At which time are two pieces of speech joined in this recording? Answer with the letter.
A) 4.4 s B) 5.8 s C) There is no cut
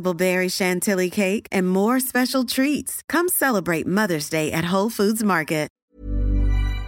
B